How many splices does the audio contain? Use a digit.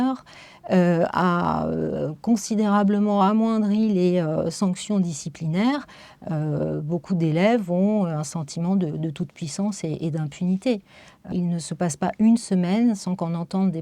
1